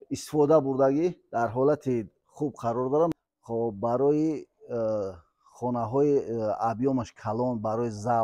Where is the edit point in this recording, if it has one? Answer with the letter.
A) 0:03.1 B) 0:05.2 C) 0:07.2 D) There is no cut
A